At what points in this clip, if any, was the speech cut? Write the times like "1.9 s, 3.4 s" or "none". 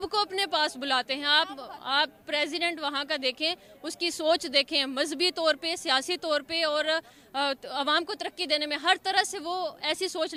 none